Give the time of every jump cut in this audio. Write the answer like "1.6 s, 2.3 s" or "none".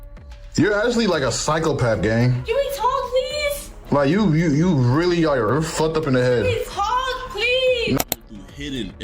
8.0 s